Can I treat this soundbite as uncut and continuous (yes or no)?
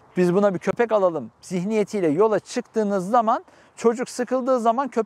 yes